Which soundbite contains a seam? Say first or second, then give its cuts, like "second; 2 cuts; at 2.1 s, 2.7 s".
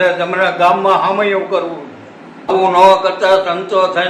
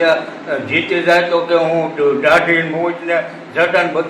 first; 1 cut; at 2.5 s